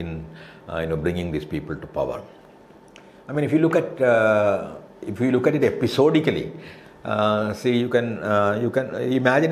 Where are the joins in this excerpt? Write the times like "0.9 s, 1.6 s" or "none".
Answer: none